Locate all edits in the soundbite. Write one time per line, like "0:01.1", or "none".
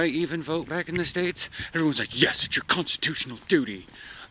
none